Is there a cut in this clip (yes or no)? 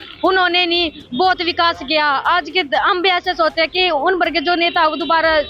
no